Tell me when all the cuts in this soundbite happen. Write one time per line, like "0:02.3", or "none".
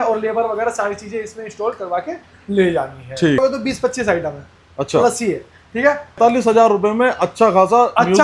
0:03.4
0:06.2